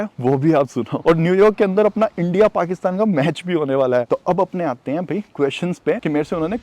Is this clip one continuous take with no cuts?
no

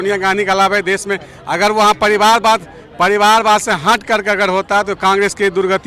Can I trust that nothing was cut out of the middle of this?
yes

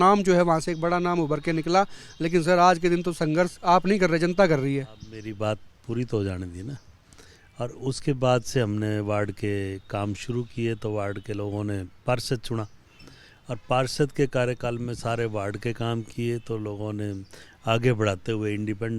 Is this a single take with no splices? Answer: yes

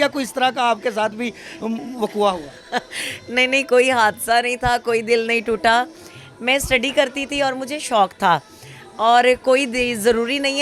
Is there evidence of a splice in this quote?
no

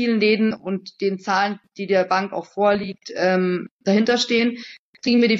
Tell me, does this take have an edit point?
no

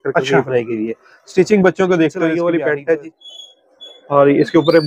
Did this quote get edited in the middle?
yes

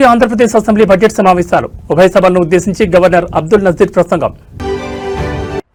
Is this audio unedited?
yes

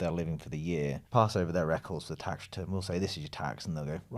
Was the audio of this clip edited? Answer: no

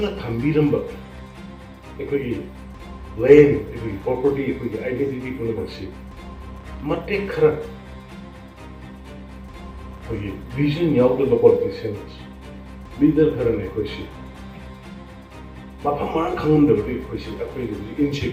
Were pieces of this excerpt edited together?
no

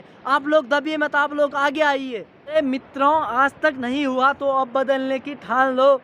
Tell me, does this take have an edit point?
yes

